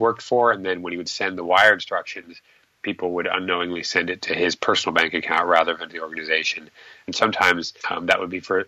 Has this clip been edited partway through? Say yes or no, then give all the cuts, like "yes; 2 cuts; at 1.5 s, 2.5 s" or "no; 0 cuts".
yes; 1 cut; at 7.0 s